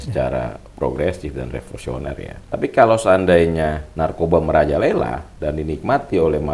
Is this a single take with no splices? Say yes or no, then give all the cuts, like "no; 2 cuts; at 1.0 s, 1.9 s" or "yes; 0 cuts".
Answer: no; 2 cuts; at 2.4 s, 3.8 s